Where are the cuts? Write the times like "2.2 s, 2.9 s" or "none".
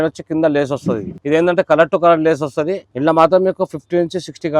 1.1 s, 2.8 s